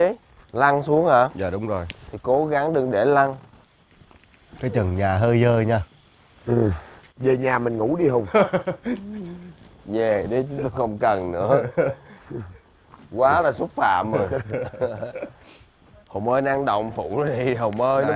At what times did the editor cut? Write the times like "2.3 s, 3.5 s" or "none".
none